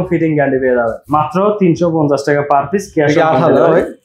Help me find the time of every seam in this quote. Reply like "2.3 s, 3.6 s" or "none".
1.0 s